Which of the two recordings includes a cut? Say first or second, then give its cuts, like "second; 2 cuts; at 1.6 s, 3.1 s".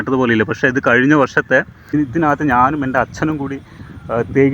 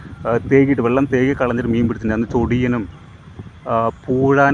first; 1 cut; at 1.9 s